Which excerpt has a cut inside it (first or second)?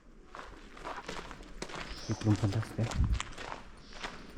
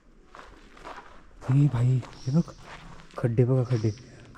first